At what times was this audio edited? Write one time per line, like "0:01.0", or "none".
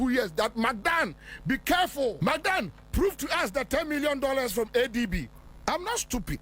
0:02.2
0:05.3